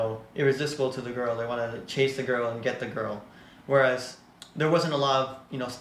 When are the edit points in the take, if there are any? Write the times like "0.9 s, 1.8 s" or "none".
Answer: none